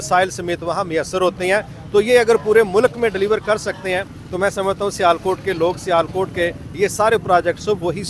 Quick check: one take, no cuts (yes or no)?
yes